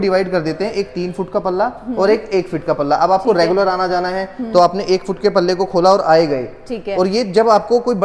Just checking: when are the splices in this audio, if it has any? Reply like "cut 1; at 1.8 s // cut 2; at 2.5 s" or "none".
none